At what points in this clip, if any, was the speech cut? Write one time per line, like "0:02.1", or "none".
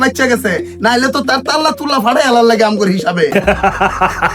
0:03.3